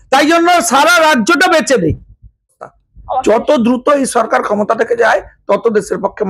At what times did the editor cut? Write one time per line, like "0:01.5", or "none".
0:02.5